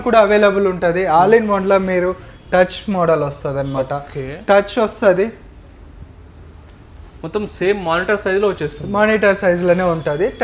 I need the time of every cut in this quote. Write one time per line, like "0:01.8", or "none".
none